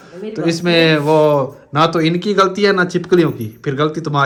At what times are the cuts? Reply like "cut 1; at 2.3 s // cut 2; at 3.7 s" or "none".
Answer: none